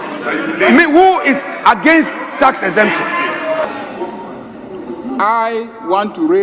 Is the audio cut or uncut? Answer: cut